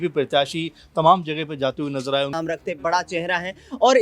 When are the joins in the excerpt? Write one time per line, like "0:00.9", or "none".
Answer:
0:02.3